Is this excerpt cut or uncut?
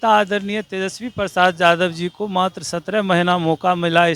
uncut